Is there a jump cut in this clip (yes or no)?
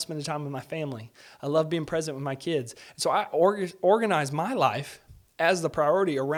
no